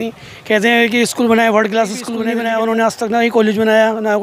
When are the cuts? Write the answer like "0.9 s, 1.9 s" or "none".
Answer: 2.1 s